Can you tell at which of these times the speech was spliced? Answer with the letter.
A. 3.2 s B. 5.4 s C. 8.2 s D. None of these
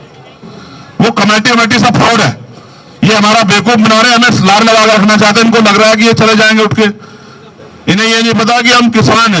D